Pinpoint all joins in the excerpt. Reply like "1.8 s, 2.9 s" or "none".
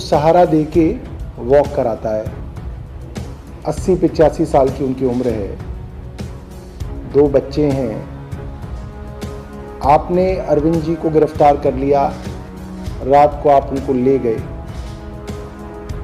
2.3 s, 3.6 s, 8.1 s, 9.8 s